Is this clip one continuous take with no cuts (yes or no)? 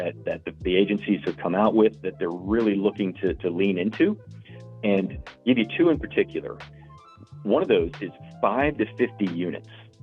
yes